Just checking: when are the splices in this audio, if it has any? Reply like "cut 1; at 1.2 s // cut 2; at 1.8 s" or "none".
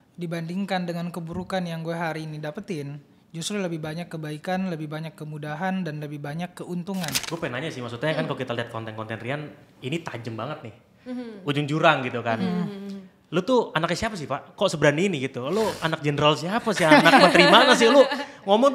cut 1; at 7.2 s

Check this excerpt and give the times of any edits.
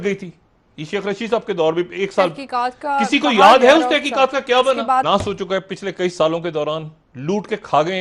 cut 1; at 5.1 s

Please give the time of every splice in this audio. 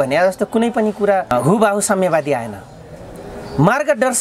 none

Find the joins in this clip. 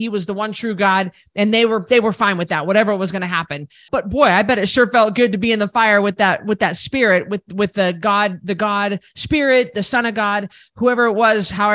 cut 1; at 3.8 s

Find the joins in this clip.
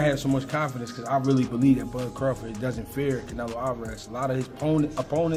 none

